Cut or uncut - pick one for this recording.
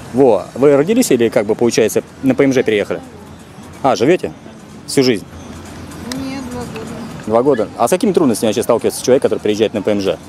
uncut